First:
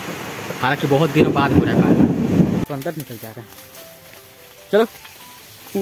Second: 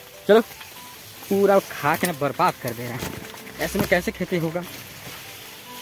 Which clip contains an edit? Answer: first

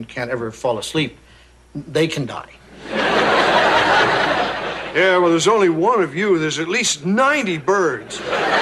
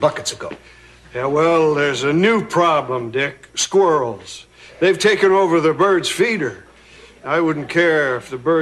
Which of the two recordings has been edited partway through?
second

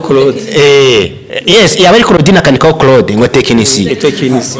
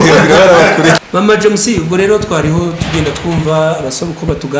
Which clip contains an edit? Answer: second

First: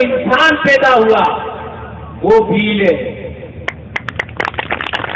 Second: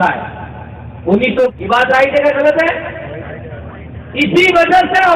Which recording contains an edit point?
second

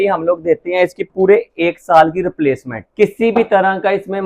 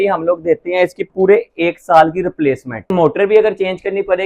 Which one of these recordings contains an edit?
second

